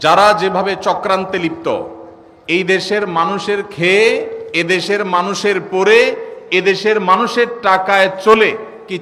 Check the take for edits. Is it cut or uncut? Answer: uncut